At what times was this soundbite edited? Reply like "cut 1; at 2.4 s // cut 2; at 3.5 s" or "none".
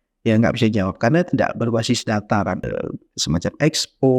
cut 1; at 2.7 s